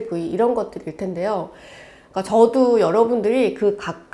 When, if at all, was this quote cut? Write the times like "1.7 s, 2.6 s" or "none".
none